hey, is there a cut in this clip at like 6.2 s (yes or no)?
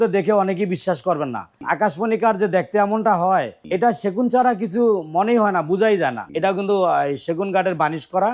yes